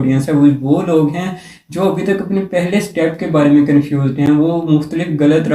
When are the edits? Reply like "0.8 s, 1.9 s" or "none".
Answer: none